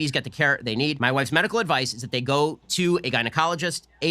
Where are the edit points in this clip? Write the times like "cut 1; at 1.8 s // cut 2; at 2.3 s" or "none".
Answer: cut 1; at 1.0 s